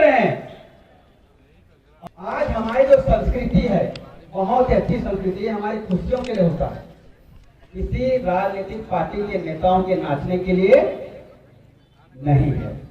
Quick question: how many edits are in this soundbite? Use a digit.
1